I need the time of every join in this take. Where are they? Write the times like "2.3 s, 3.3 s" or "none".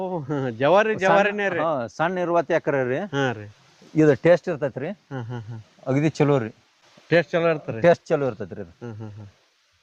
none

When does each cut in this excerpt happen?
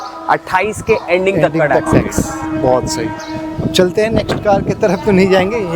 none

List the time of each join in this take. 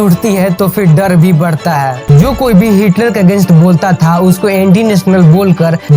2.0 s

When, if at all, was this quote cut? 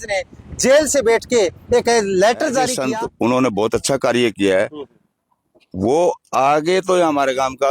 2.8 s

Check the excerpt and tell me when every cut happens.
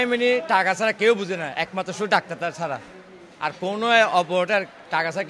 none

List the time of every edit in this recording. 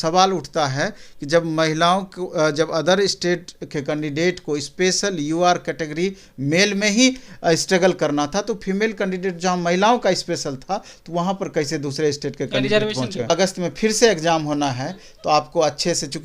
13.3 s

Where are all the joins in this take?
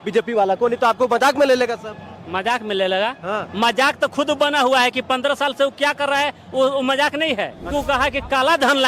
7.7 s

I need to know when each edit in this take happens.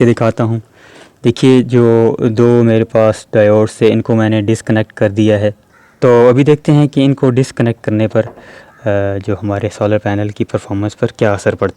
5.7 s

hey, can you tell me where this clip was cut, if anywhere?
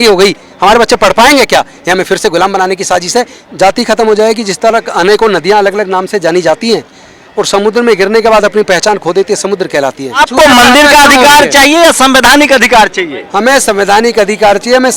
3.4 s, 10.2 s

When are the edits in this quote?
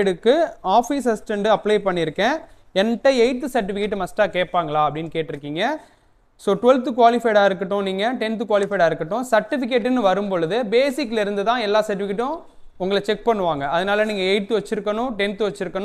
none

